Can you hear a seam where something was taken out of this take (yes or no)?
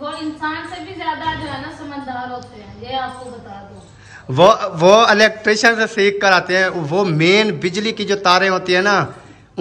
no